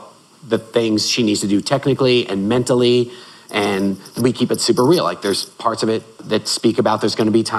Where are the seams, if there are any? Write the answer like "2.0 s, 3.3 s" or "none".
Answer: 4.2 s, 6.2 s